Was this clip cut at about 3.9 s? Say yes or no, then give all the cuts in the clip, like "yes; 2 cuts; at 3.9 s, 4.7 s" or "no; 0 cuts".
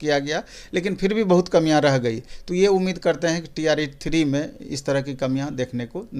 no; 0 cuts